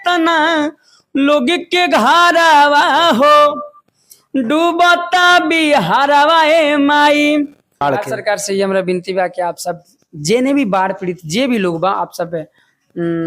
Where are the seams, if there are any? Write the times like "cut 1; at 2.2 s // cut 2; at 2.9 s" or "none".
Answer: cut 1; at 7.7 s